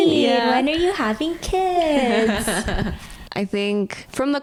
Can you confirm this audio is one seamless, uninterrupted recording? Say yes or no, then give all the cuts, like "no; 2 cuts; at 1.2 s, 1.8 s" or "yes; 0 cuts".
yes; 0 cuts